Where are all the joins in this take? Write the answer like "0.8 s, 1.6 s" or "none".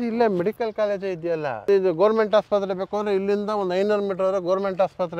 1.6 s